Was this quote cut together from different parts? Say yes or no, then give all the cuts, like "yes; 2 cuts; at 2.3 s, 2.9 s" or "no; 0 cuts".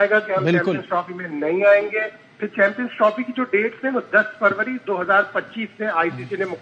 no; 0 cuts